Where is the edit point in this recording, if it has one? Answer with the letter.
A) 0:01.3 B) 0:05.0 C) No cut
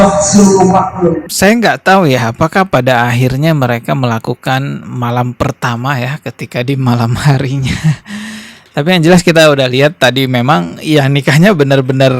A